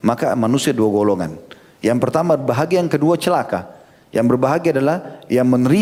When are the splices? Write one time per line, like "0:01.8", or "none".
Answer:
none